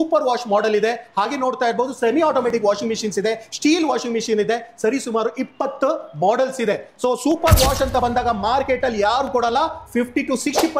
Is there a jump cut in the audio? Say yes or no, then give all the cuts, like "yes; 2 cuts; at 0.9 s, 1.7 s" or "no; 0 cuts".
no; 0 cuts